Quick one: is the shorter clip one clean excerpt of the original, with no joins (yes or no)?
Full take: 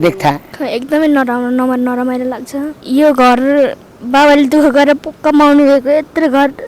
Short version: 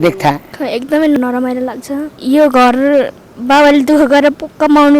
no